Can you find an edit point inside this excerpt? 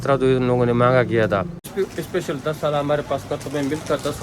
yes; 1 cut; at 1.7 s

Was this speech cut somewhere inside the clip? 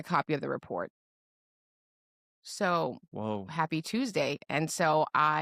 no; 0 cuts

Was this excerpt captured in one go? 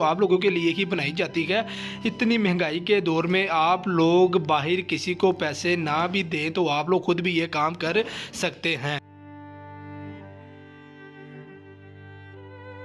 yes; 0 cuts

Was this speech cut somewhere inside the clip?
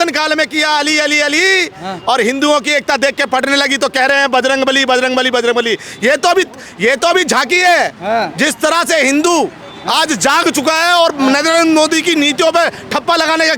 no; 0 cuts

